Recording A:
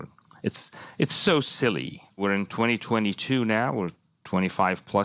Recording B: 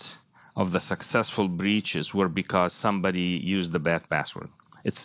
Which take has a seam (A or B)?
A